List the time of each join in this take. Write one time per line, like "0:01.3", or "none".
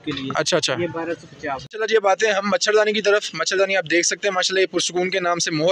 0:01.6